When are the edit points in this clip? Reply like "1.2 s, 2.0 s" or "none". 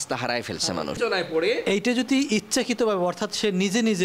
1.0 s